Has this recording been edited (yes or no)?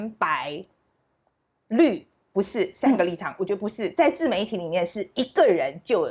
no